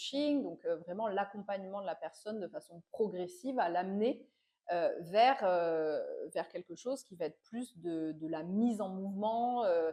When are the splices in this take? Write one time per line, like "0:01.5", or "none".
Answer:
none